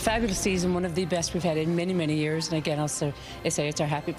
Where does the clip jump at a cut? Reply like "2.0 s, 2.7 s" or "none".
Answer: none